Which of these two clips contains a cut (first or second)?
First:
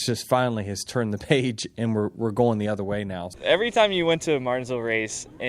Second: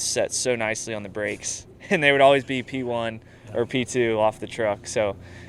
first